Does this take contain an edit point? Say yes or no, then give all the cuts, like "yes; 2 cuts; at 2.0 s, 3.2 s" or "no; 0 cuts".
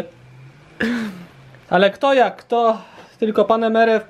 no; 0 cuts